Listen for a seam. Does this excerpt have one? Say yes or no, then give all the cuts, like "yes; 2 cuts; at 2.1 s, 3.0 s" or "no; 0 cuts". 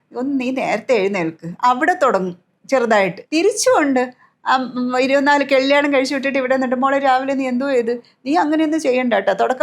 yes; 1 cut; at 3.2 s